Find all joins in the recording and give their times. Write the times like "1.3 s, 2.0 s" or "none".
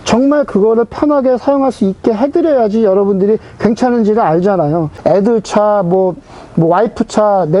5.0 s